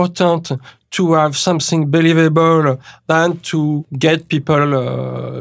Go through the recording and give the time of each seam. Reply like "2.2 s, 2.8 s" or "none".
3.0 s, 3.9 s

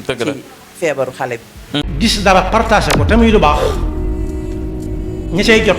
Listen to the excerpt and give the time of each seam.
1.8 s

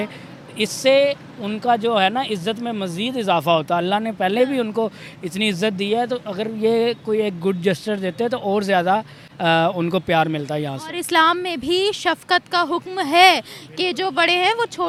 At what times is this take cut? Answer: none

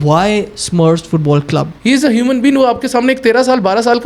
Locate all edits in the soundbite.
1.7 s

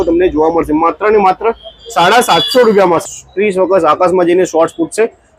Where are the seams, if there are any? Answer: 3.0 s

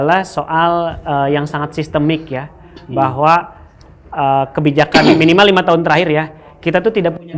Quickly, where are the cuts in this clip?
none

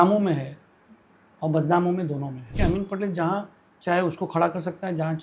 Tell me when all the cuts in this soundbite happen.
2.6 s

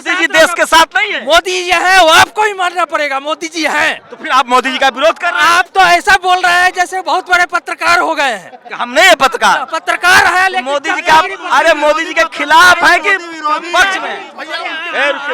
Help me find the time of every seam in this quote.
14.2 s

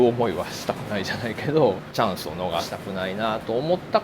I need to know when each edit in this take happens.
1.8 s, 2.7 s

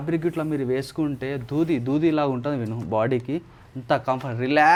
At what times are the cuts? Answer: none

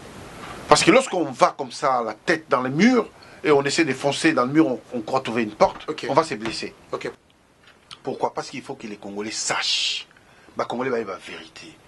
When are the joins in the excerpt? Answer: 7.1 s

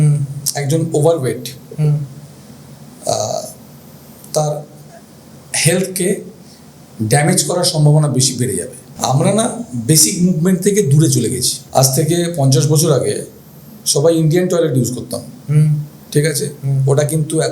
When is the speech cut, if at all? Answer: 8.8 s, 11.5 s

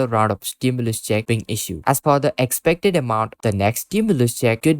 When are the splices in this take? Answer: 1.7 s, 3.3 s

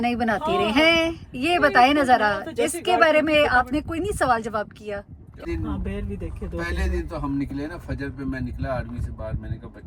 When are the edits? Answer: 5.4 s

